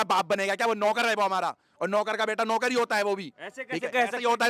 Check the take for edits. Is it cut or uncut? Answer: uncut